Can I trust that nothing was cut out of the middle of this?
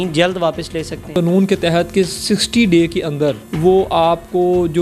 no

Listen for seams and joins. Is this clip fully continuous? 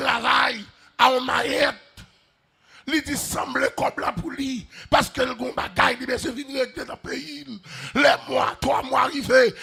yes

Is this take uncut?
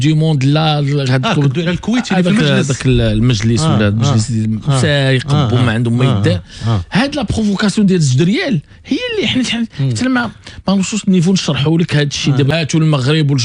no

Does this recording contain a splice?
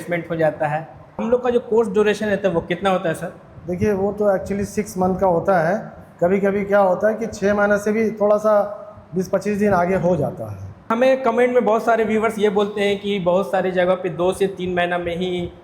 yes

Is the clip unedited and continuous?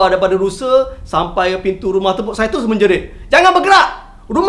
yes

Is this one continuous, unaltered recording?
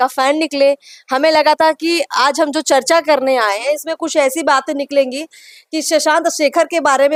yes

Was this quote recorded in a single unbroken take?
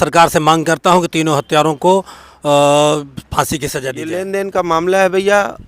no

